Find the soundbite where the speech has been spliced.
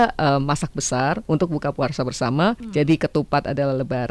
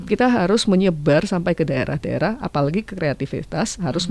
first; 1 cut; at 2.6 s

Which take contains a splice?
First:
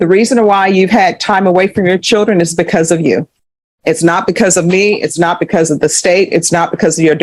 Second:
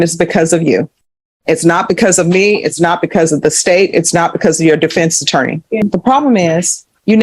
second; 1 cut; at 5.8 s

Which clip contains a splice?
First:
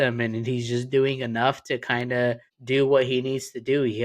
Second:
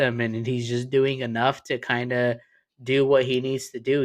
first; 1 cut; at 2.5 s

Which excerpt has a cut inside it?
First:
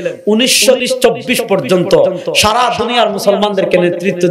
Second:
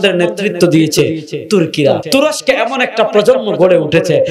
second; 1 cut; at 2.0 s

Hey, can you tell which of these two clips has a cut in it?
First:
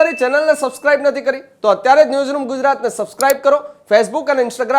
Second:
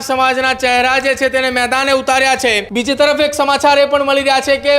second; 1 cut; at 2.7 s

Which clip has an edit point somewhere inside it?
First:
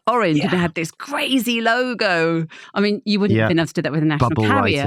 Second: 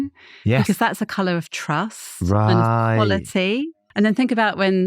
second; 1 cut; at 3.7 s

